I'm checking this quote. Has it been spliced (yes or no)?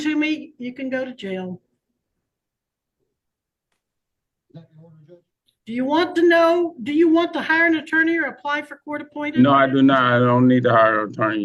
no